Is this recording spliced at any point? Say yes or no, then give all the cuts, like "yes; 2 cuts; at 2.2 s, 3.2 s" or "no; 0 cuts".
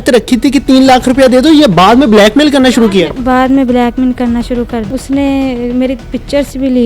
yes; 1 cut; at 4.8 s